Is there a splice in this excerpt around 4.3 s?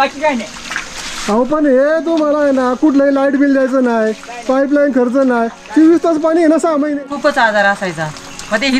no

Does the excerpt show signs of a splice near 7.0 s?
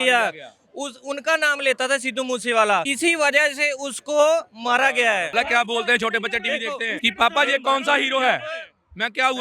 yes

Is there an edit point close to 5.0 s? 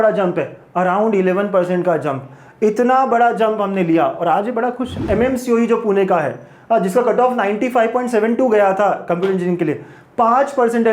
yes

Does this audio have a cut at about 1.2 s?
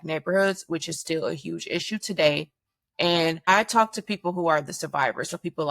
no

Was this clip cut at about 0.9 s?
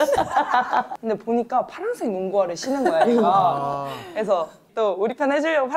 yes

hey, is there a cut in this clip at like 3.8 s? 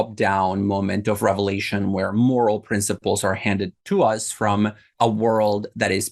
yes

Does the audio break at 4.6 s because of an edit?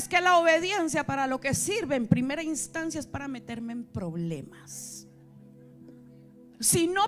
no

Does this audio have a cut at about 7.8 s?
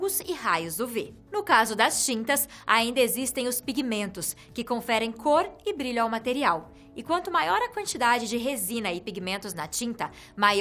no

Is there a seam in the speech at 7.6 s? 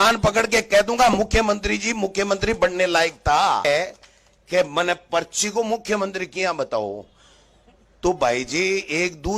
no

